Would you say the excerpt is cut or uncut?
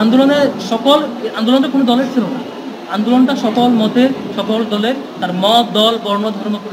uncut